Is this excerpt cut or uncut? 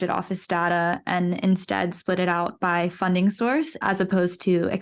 cut